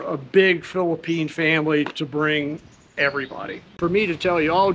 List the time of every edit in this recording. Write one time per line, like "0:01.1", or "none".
0:03.8